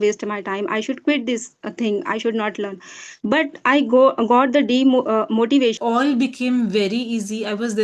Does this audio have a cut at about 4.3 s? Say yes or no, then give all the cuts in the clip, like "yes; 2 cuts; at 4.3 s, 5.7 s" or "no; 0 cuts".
no; 1 cut; at 5.8 s